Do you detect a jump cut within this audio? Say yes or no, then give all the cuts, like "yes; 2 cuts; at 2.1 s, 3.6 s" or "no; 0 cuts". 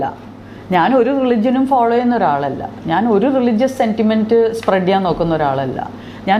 no; 0 cuts